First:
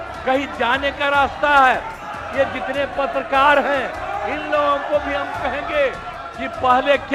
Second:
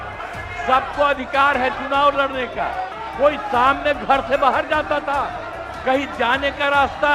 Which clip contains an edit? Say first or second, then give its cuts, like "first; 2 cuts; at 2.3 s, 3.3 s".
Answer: second; 1 cut; at 3.0 s